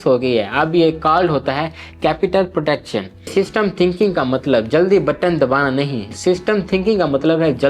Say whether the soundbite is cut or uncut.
cut